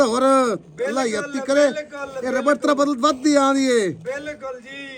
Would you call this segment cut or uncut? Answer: uncut